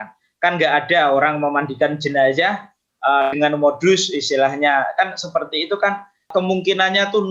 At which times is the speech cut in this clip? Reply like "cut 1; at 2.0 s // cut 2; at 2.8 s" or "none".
cut 1; at 6.3 s

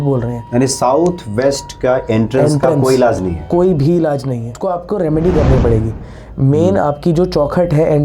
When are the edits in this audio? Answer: cut 1; at 4.6 s

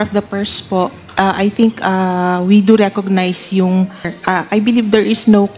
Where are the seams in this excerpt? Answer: cut 1; at 4.2 s

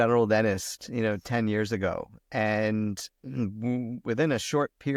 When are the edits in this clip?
none

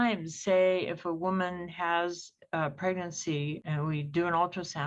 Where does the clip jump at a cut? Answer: cut 1; at 3.6 s

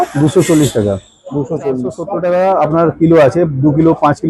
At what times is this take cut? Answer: cut 1; at 2.1 s

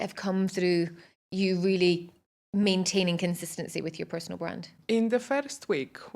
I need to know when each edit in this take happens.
cut 1; at 4.7 s

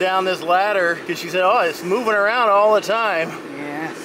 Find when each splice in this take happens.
cut 1; at 1.1 s

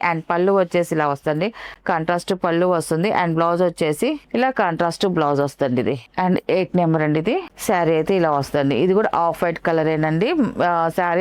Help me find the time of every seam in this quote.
none

